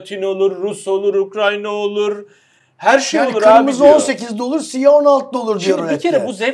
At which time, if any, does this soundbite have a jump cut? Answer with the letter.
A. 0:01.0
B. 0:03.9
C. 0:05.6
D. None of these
D